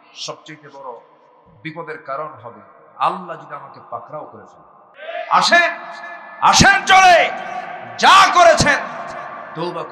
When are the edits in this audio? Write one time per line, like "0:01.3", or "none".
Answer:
0:05.0